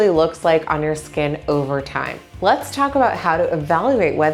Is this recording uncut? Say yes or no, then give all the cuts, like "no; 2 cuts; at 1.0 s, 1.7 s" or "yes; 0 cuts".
no; 1 cut; at 2.2 s